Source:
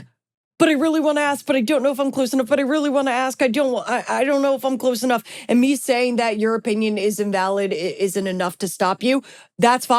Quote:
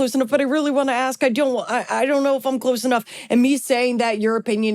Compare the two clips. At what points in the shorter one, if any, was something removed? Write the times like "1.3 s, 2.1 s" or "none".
none